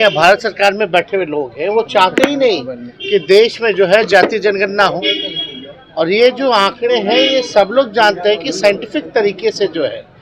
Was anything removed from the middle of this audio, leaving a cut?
no; 0 cuts

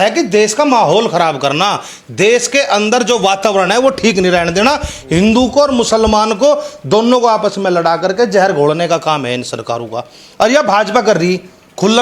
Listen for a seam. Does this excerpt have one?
no; 0 cuts

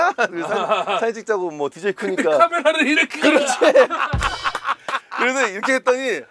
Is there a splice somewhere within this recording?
no; 0 cuts

